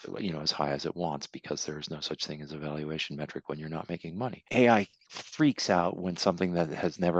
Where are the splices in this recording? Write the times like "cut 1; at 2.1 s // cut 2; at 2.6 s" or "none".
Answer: cut 1; at 4.4 s